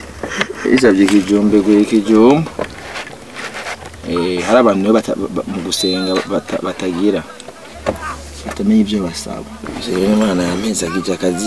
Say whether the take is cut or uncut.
cut